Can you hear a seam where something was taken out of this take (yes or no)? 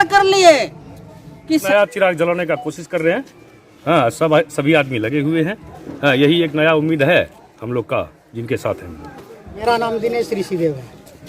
yes